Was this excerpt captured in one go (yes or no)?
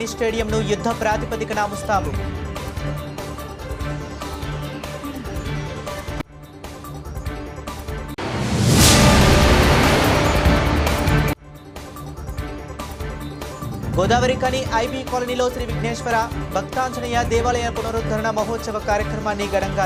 yes